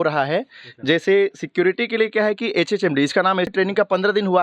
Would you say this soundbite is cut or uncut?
cut